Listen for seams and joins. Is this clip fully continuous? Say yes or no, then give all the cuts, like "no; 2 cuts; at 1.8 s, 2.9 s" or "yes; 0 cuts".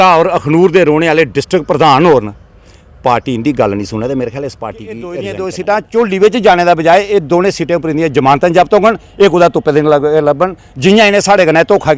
no; 1 cut; at 5.0 s